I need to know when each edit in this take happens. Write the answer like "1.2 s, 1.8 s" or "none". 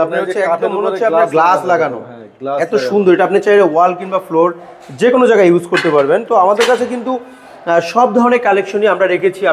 none